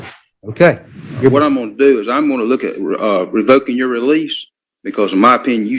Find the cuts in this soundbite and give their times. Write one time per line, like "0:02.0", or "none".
0:01.3